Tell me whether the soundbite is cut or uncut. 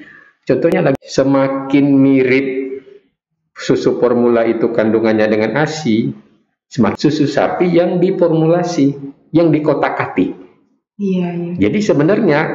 cut